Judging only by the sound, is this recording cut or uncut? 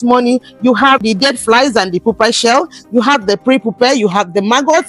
cut